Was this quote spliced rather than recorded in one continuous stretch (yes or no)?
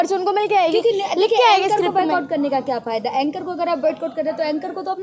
no